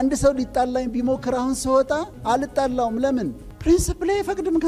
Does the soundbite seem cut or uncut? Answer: cut